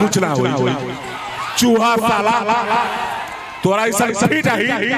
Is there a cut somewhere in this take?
no; 0 cuts

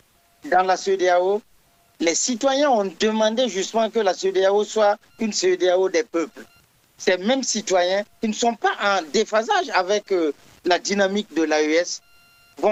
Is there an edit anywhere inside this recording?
no; 0 cuts

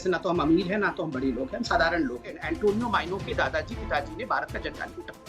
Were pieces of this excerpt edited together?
yes; 1 cut; at 2.4 s

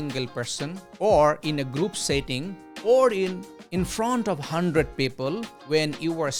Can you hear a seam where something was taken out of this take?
no; 0 cuts

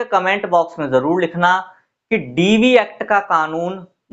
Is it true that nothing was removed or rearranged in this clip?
yes; 0 cuts

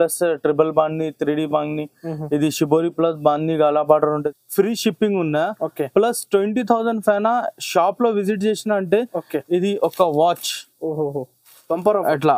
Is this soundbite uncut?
no; 1 cut; at 4.1 s

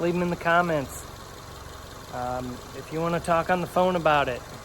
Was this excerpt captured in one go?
yes; 0 cuts

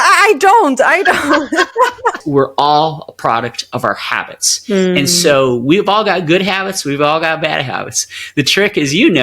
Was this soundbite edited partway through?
yes; 1 cut; at 2.2 s

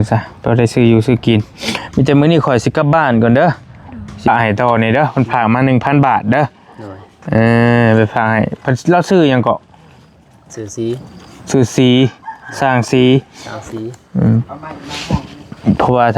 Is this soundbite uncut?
no; 1 cut; at 4.3 s

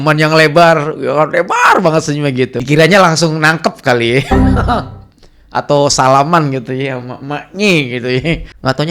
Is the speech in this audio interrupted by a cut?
yes; 1 cut; at 2.6 s

